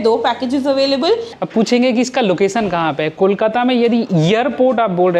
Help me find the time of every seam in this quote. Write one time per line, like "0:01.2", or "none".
0:01.3